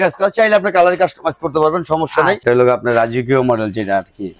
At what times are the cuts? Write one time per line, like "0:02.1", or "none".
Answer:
0:02.4